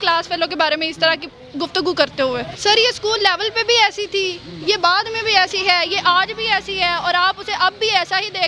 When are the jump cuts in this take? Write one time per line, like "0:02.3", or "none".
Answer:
0:02.5